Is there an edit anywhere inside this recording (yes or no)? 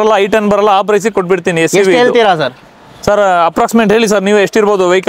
no